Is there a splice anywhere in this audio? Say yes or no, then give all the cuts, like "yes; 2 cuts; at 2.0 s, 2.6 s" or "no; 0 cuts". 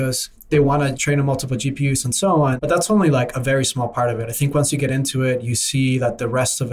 yes; 2 cuts; at 0.9 s, 2.6 s